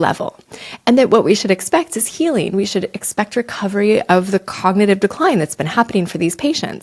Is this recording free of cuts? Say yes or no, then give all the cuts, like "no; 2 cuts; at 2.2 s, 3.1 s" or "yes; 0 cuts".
yes; 0 cuts